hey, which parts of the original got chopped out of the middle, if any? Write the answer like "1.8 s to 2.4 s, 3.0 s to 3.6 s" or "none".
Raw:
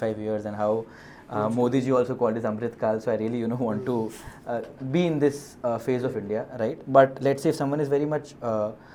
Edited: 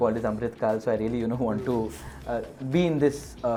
none